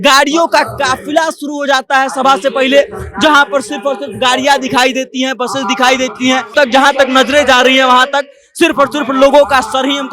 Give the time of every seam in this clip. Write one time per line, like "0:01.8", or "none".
0:06.5